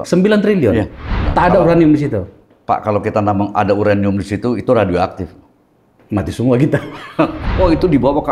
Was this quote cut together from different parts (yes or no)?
yes